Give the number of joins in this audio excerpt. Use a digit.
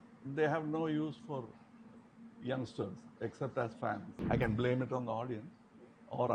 1